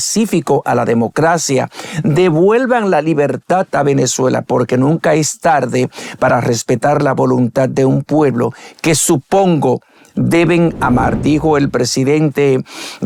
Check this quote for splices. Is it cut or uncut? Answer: uncut